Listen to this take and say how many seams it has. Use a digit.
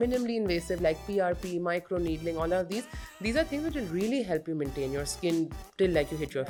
0